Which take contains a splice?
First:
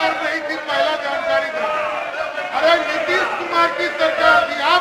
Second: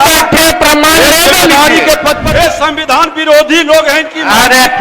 second; 1 cut; at 2.2 s

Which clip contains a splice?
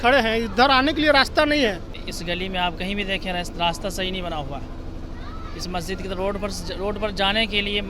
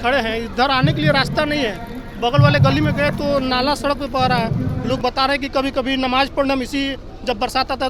first; 1 cut; at 2.0 s

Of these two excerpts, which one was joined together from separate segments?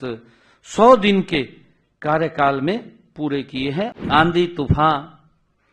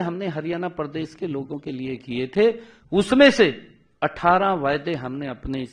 first; 1 cut; at 4.0 s

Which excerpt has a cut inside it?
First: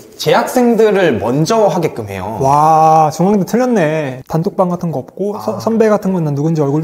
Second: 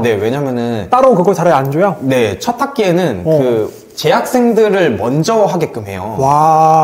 first; 1 cut; at 4.2 s

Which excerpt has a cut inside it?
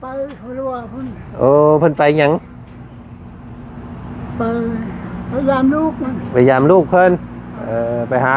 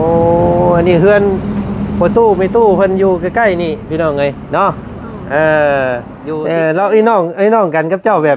second; 1 cut; at 6.1 s

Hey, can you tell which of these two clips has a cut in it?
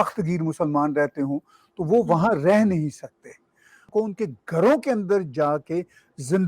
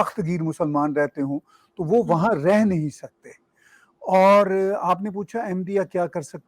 first; 1 cut; at 3.8 s

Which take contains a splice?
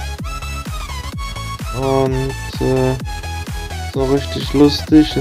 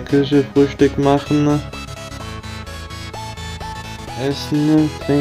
second; 2 cuts; at 1.6 s, 3.9 s

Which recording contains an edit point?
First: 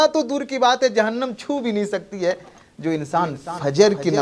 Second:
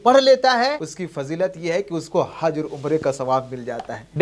second; 1 cut; at 0.9 s

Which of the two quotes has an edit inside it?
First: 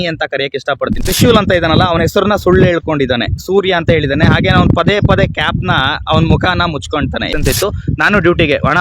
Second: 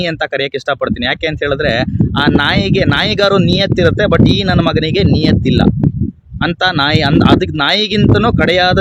first; 2 cuts; at 1.0 s, 7.3 s

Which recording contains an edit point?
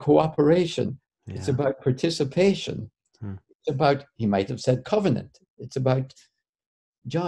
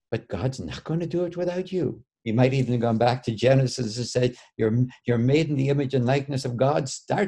second; 1 cut; at 2.1 s

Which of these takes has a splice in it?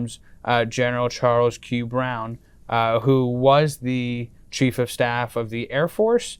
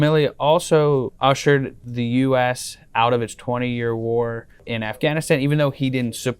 second; 2 cuts; at 1.1 s, 4.6 s

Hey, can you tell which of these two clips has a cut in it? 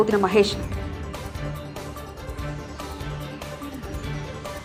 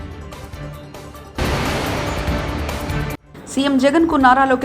second; 2 cuts; at 1.3 s, 3.2 s

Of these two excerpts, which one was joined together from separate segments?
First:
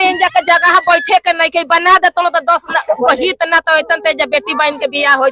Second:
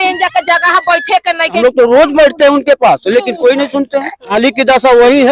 second; 2 cuts; at 1.6 s, 4.3 s

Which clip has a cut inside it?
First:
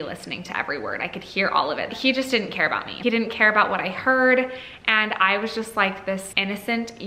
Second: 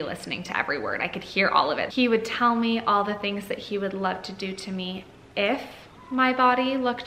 second; 1 cut; at 1.9 s

